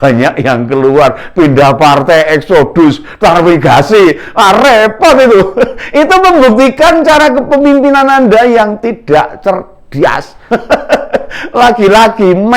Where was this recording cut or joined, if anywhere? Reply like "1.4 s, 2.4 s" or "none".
10.4 s

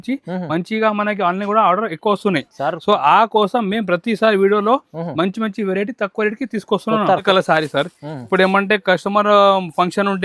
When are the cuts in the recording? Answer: 7.2 s

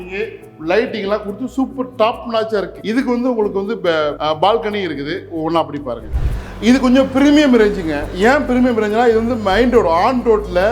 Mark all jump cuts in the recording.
2.8 s, 6.1 s

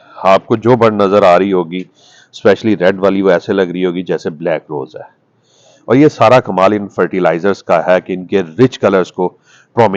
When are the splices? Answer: none

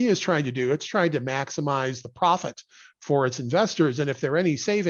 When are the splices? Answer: none

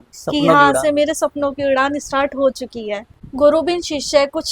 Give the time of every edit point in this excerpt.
3.1 s

